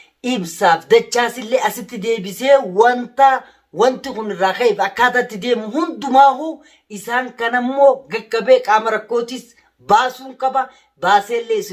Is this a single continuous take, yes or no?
yes